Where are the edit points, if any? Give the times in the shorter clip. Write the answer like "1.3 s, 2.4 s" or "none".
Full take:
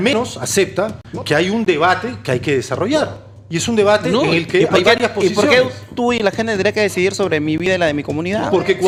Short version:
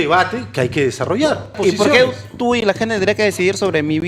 1.6 s